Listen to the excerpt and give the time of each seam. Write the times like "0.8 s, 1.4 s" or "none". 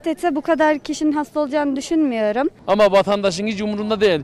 2.6 s